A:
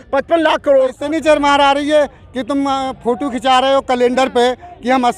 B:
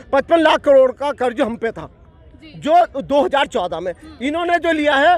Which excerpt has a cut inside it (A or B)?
A